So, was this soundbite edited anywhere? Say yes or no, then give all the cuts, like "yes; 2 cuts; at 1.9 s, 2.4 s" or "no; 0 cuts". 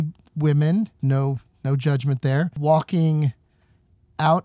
yes; 2 cuts; at 1.0 s, 2.5 s